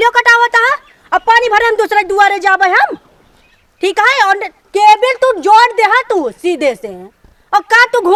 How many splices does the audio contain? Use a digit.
0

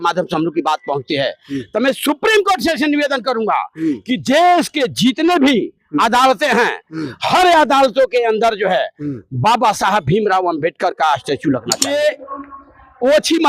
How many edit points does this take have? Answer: 1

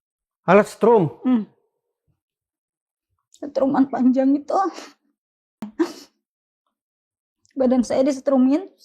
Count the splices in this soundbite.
1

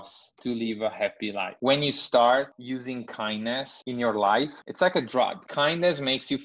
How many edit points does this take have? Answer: 5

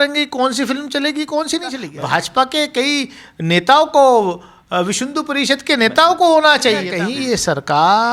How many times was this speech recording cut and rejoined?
2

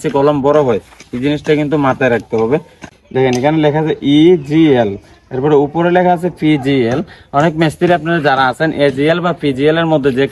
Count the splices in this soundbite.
1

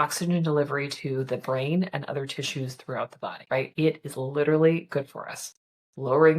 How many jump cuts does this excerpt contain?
1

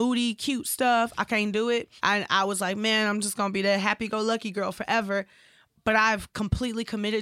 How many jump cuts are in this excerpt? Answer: 0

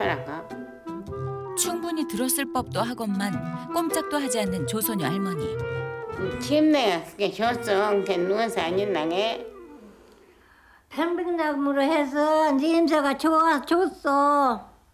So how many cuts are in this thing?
1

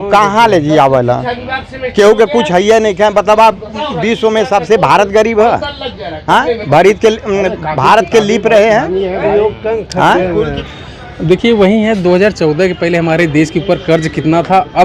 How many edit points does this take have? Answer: 1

